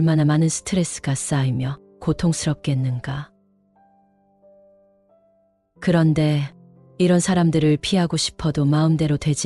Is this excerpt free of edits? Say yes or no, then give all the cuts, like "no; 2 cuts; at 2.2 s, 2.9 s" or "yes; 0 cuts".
no; 2 cuts; at 3.3 s, 5.8 s